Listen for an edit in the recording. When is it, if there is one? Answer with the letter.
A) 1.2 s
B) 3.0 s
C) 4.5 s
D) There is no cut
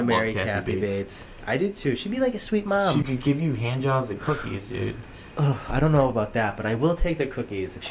B